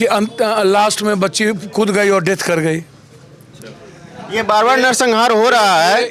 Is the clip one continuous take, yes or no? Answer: yes